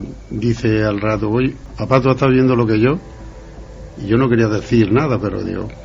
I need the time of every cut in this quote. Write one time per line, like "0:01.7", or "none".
0:01.7